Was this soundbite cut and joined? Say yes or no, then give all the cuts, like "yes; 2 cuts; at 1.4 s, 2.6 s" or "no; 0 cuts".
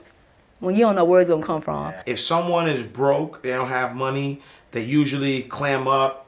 yes; 1 cut; at 2.0 s